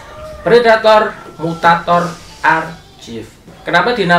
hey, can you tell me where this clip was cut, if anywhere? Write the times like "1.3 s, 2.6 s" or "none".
none